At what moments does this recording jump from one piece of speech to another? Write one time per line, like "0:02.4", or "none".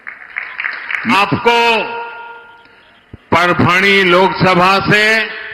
0:01.1